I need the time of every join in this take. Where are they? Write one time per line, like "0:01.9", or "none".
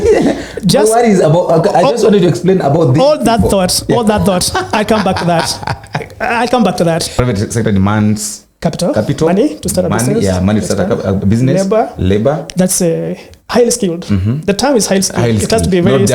0:07.2